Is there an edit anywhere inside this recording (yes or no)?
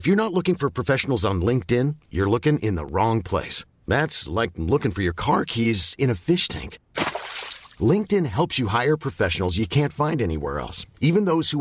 no